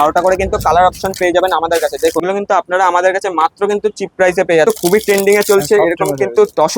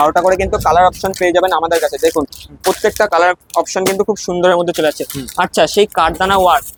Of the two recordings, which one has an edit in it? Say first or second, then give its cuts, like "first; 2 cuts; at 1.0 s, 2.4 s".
first; 2 cuts; at 2.2 s, 4.6 s